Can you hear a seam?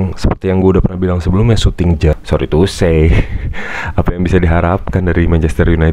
yes; 1 cut; at 2.2 s

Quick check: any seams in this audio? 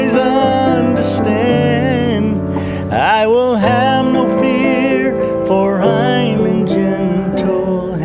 no; 0 cuts

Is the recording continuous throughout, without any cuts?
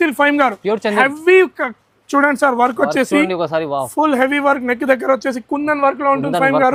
yes; 0 cuts

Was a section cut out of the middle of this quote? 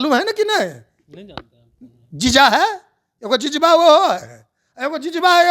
no; 0 cuts

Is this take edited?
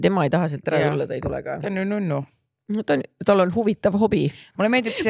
no; 0 cuts

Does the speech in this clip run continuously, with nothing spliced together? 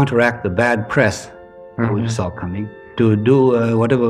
no; 1 cut; at 2.9 s

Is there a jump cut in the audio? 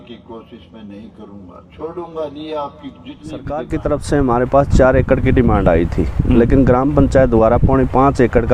yes; 1 cut; at 3.6 s

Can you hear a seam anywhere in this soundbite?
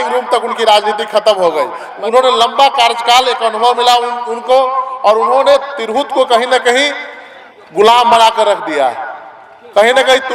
yes; 1 cut; at 1.8 s

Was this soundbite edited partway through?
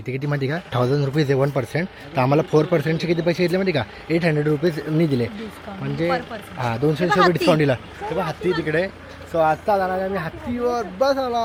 no; 0 cuts

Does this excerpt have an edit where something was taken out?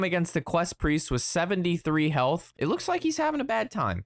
yes; 1 cut; at 2.5 s

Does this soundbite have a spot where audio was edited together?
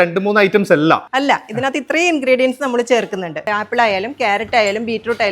yes; 1 cut; at 3.4 s

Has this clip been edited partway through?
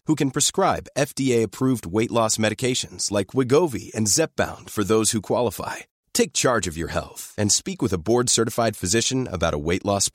no; 0 cuts

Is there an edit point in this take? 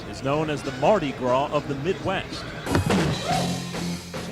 yes; 1 cut; at 2.6 s

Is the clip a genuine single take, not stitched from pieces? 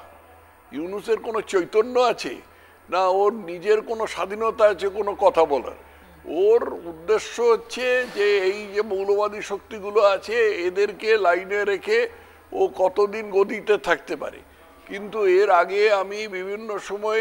yes; 0 cuts

